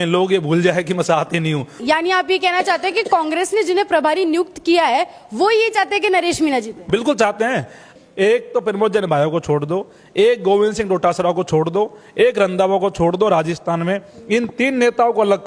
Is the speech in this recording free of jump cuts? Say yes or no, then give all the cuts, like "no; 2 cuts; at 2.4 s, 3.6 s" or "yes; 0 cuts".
no; 2 cuts; at 1.8 s, 7.8 s